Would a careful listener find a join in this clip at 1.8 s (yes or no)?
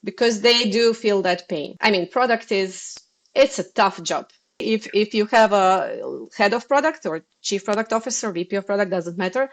yes